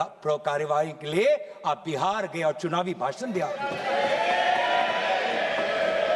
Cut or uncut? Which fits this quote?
uncut